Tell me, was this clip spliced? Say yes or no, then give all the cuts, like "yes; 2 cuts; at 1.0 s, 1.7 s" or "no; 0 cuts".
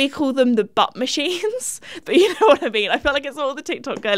yes; 1 cut; at 2.0 s